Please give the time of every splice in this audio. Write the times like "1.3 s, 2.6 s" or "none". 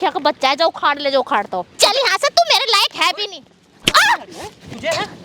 1.7 s